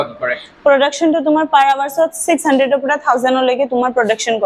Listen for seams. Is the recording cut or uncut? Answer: uncut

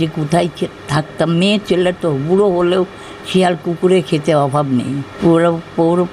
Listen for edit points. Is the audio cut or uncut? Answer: cut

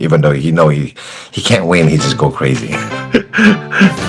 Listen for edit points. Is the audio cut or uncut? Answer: uncut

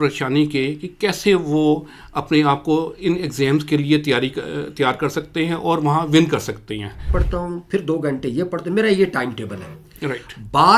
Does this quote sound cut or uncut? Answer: cut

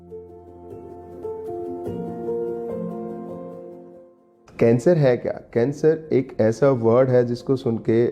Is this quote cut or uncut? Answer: cut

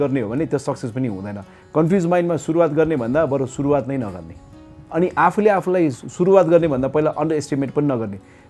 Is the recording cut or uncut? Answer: cut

